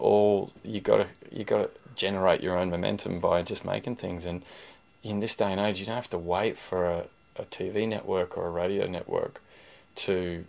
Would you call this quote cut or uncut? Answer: uncut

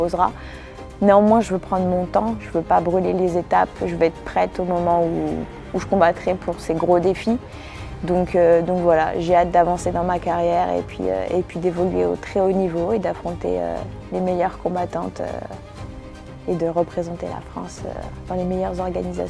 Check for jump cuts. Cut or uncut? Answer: cut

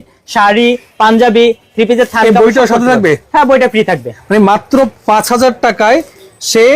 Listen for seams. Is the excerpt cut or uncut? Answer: cut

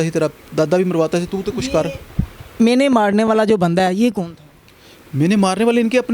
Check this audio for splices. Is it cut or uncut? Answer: uncut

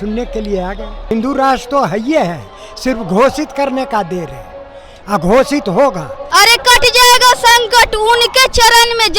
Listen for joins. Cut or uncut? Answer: cut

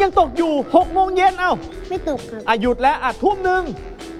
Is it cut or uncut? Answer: cut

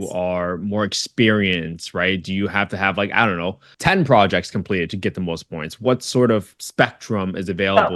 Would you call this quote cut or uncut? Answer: uncut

